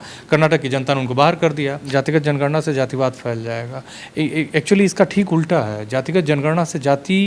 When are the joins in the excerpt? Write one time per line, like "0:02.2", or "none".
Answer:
0:01.8